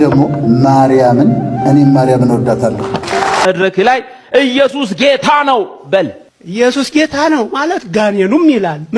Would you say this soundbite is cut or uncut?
cut